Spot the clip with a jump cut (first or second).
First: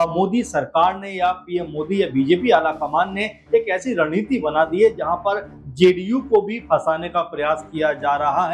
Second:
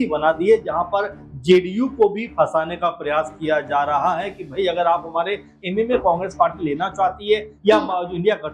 second